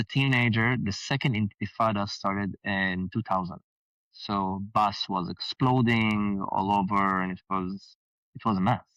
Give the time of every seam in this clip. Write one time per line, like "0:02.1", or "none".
none